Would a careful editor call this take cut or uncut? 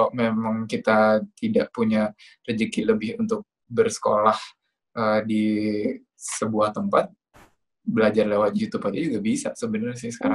uncut